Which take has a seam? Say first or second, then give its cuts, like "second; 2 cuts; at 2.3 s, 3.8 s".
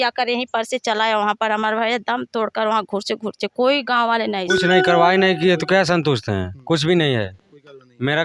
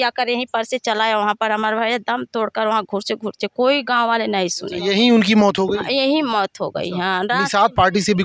first; 1 cut; at 4.6 s